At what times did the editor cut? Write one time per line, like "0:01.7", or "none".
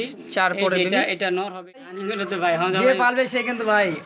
0:01.8